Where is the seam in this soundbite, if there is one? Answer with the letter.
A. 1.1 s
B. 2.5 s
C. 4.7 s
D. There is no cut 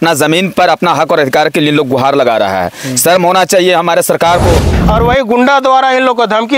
C